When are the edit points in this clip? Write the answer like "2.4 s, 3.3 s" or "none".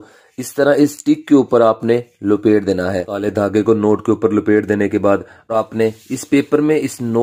3.1 s, 5.5 s